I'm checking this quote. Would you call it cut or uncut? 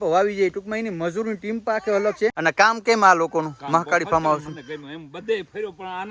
cut